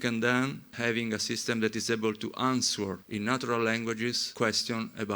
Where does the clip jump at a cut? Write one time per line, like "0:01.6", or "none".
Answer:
0:00.8
0:03.0
0:04.2

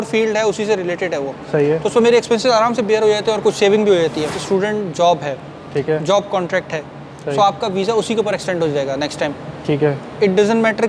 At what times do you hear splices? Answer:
0:04.4

